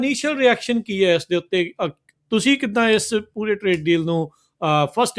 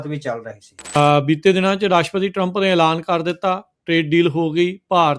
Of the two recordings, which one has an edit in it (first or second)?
second